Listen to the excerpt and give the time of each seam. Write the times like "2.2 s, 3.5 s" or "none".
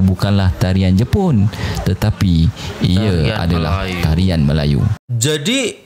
4.9 s

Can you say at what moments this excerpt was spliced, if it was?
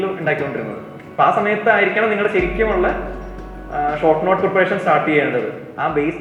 none

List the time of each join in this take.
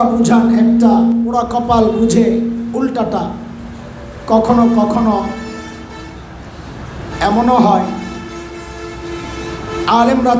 1.3 s

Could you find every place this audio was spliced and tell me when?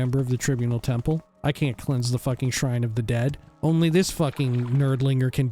3.5 s

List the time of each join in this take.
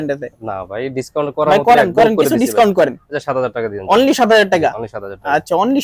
none

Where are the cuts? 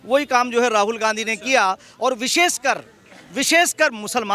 none

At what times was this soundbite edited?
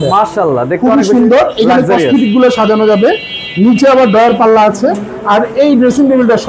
none

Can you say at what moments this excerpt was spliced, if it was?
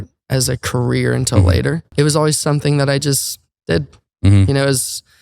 1.9 s

